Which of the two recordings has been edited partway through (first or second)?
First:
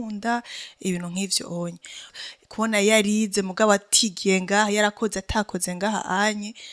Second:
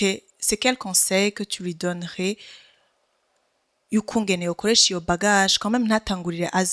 first